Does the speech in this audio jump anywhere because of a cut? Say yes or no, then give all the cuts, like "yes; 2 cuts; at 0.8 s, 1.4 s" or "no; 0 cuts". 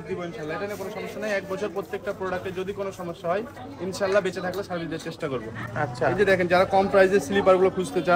no; 0 cuts